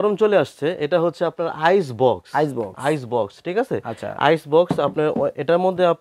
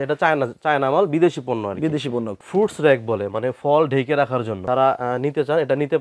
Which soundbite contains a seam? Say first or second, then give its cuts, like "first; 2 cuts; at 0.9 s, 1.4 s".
second; 2 cuts; at 2.4 s, 4.6 s